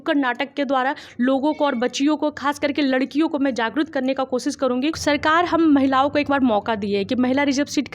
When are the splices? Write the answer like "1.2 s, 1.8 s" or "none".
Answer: 5.0 s